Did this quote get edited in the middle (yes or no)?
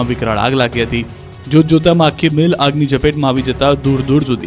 yes